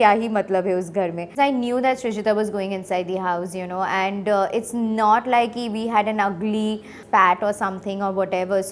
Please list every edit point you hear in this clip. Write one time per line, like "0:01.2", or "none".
0:01.3